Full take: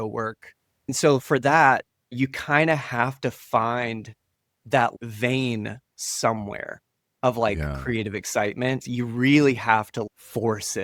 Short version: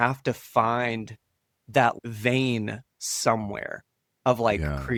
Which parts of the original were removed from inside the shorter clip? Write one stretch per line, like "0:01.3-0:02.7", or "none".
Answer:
none